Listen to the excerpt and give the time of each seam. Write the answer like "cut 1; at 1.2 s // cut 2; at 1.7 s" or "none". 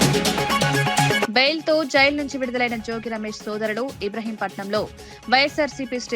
cut 1; at 1.2 s